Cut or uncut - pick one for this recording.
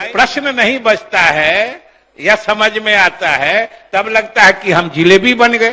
uncut